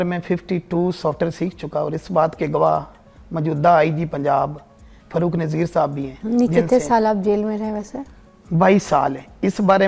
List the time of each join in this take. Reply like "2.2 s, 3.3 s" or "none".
none